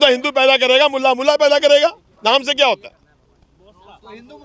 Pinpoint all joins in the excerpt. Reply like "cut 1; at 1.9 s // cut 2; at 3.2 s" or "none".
none